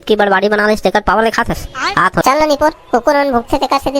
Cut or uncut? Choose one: cut